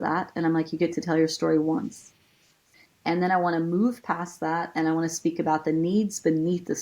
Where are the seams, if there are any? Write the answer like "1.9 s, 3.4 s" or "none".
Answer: 2.6 s